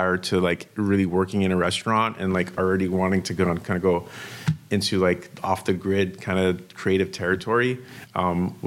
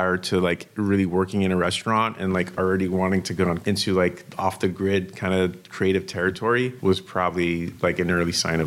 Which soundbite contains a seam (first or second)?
second